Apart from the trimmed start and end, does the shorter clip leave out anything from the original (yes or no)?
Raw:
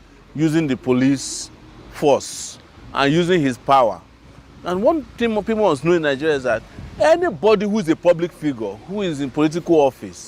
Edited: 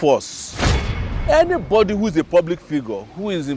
yes